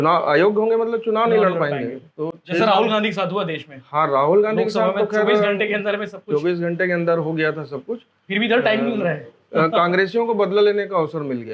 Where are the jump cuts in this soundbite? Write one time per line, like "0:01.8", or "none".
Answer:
none